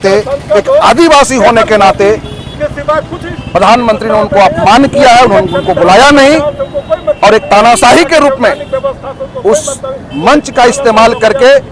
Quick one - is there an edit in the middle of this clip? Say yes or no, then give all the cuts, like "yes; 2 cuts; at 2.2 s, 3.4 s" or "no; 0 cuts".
no; 0 cuts